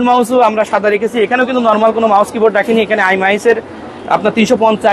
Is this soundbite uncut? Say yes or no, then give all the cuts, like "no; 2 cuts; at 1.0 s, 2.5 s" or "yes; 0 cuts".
yes; 0 cuts